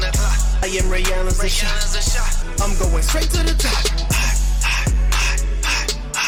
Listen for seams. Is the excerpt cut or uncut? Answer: uncut